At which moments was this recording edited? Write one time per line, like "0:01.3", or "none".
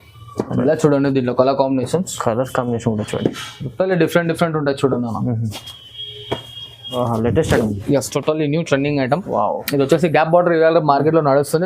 0:06.9